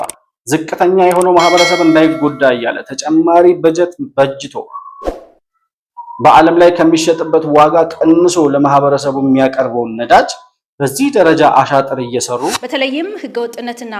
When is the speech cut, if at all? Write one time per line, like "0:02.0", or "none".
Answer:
0:12.6